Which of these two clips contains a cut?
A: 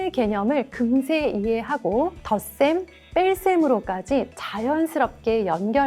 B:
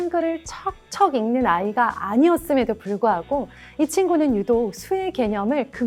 A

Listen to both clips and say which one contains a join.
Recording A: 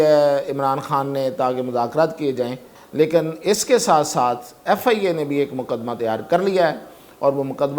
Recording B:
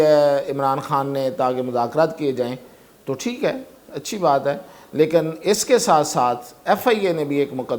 A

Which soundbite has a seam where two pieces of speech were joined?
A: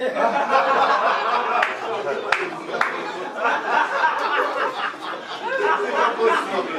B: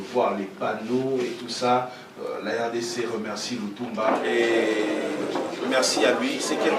B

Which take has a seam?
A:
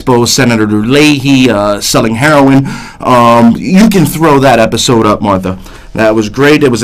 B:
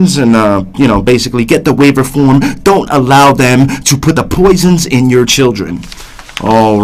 A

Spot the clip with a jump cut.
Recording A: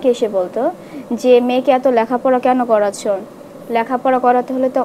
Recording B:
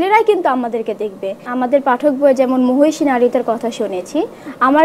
B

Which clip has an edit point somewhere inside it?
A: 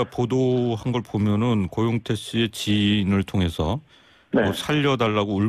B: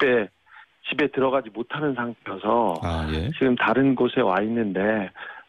B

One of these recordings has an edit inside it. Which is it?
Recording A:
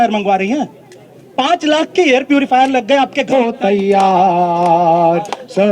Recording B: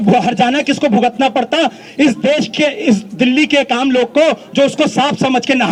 A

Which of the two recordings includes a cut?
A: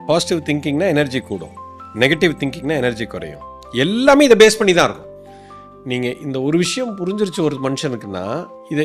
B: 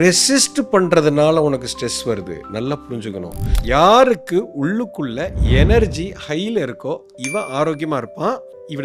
B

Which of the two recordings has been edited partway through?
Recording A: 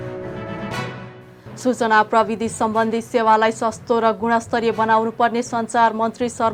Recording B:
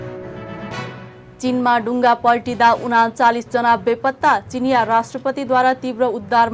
B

